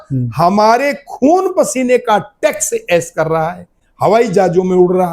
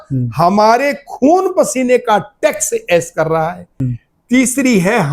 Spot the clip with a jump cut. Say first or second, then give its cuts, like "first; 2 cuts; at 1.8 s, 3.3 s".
second; 1 cut; at 3.8 s